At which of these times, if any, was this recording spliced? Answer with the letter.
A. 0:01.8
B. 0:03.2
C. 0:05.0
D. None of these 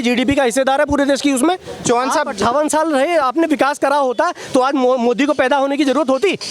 A